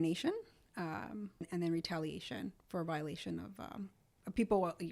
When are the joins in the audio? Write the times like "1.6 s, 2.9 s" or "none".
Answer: 1.5 s